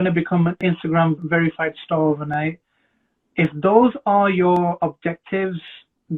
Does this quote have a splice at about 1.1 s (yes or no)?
yes